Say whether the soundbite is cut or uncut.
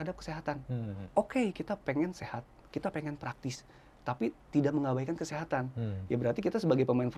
uncut